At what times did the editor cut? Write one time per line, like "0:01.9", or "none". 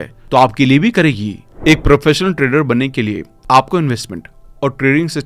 0:01.5